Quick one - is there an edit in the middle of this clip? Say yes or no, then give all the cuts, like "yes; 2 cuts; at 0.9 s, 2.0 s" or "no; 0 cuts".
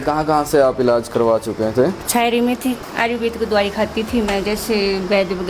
no; 0 cuts